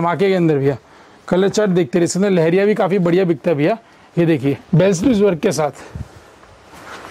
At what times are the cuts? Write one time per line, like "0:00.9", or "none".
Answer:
0:04.6